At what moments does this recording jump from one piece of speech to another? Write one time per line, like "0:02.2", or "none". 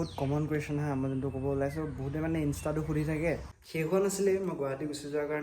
0:03.6